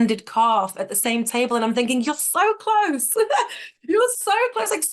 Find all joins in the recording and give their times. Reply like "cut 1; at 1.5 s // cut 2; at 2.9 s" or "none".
none